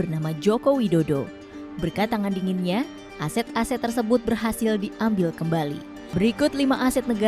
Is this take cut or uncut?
cut